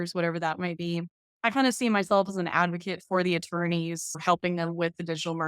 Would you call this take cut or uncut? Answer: cut